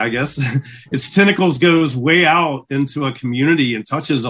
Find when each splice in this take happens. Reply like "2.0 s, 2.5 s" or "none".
none